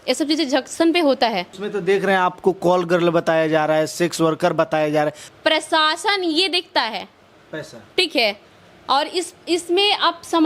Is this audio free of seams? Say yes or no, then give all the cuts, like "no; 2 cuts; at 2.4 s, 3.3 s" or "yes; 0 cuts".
no; 2 cuts; at 1.6 s, 5.2 s